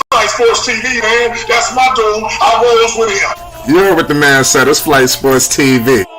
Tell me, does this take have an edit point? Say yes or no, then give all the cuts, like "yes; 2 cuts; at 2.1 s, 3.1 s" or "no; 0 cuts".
yes; 1 cut; at 1.0 s